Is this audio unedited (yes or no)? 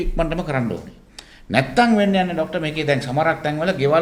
yes